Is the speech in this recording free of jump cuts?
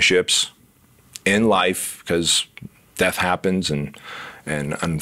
yes; 0 cuts

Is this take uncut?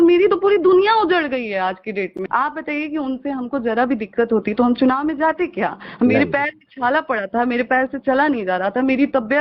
no; 1 cut; at 2.2 s

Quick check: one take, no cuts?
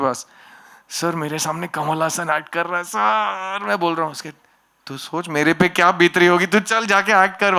yes; 0 cuts

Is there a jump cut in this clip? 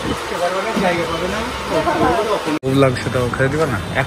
yes; 1 cut; at 2.7 s

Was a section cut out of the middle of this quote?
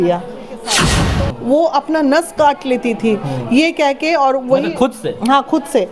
yes; 1 cut; at 1.0 s

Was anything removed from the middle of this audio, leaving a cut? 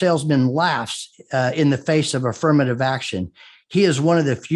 no; 0 cuts

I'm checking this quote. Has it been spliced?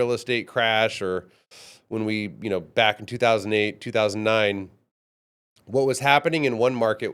no; 0 cuts

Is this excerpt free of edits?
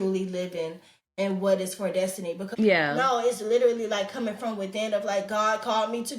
no; 1 cut; at 2.4 s

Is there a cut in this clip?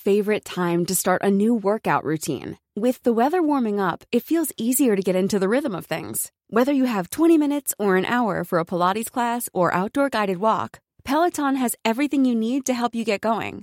no; 0 cuts

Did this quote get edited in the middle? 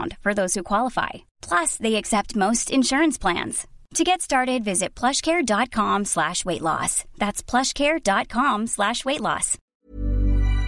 yes; 1 cut; at 9.7 s

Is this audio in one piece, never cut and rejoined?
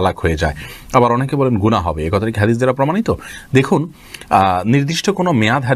yes; 0 cuts

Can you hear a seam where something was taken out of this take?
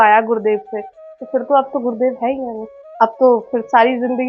no; 0 cuts

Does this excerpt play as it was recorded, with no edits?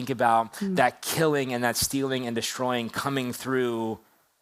yes; 0 cuts

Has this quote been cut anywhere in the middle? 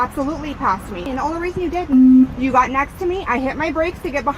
yes; 1 cut; at 1.1 s

